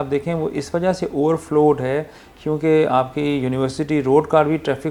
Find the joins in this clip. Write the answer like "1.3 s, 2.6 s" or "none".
none